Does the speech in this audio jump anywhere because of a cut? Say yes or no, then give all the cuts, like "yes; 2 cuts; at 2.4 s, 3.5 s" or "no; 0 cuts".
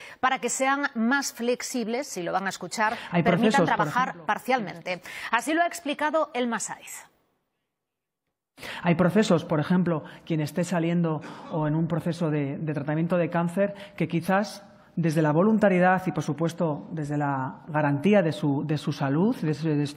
no; 0 cuts